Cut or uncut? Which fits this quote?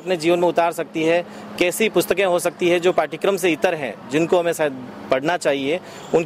uncut